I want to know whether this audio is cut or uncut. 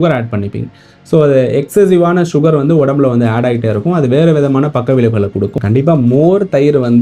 cut